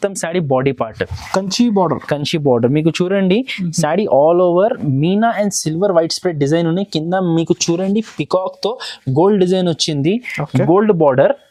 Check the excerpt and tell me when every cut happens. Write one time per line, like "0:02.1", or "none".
none